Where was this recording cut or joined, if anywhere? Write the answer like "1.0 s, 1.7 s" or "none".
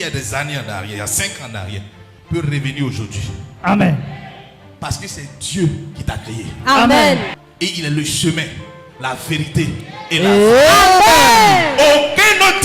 7.4 s